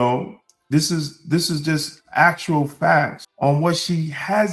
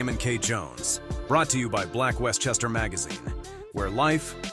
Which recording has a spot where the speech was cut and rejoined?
first; 1 cut; at 3.2 s

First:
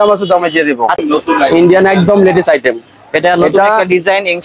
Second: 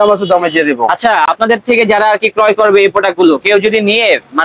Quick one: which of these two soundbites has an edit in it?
first; 1 cut; at 1.0 s

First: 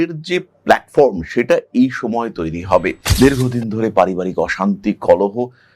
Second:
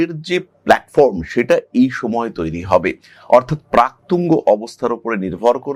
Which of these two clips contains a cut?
first; 1 cut; at 3.0 s

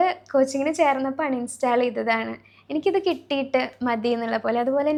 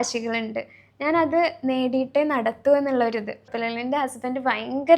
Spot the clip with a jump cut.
second; 1 cut; at 3.5 s

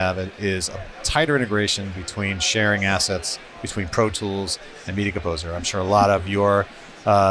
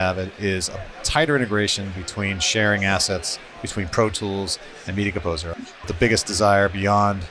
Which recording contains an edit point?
second; 1 cut; at 5.8 s

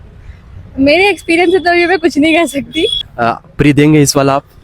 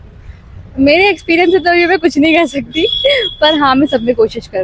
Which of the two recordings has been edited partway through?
first; 1 cut; at 2.9 s

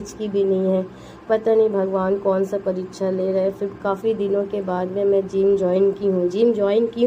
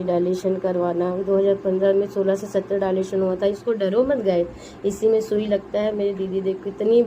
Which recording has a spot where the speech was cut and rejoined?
second; 1 cut; at 1.6 s

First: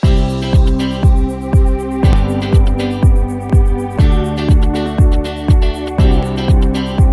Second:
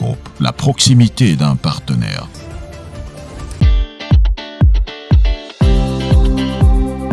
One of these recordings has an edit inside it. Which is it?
second; 1 cut; at 3.5 s

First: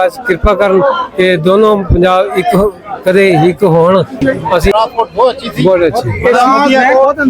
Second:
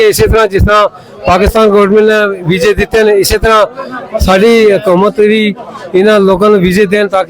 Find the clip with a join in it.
first; 1 cut; at 4.7 s

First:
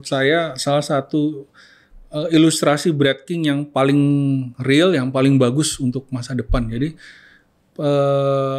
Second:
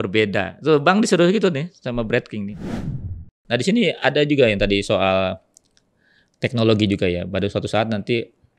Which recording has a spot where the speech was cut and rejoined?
second; 1 cut; at 2.8 s

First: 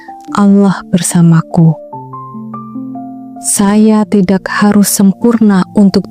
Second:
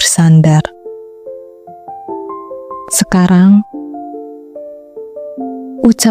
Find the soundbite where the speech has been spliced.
second; 2 cuts; at 1.1 s, 2.9 s

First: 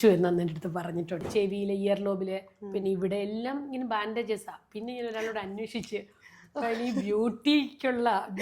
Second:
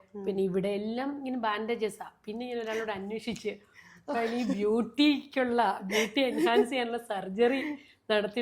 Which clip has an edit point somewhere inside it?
first; 1 cut; at 1.1 s

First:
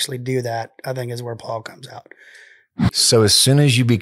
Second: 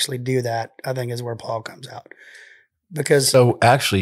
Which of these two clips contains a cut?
first; 1 cut; at 3.1 s

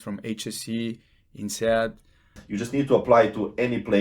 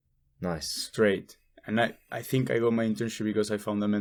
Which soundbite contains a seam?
first; 1 cut; at 2.4 s

